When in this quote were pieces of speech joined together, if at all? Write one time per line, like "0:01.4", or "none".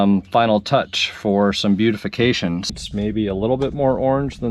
0:02.7